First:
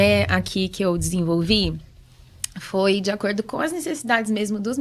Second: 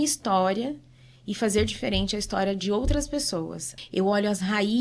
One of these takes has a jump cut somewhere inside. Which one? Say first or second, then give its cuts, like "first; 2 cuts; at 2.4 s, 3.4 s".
second; 1 cut; at 3.7 s